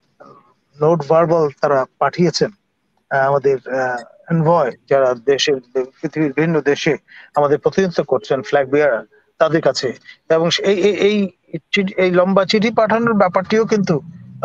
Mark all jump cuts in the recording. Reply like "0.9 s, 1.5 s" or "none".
none

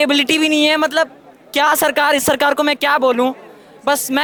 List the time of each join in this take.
none

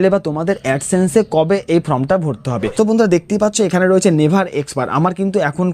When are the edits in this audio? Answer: 2.6 s

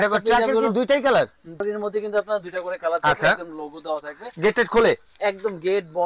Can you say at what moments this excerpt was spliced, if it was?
1.6 s

